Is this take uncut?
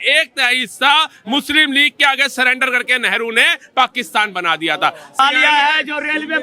no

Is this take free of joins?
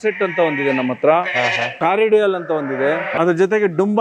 no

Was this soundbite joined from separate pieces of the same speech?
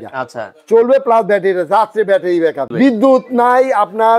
yes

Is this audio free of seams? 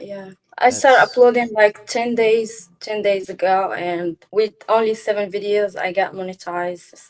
yes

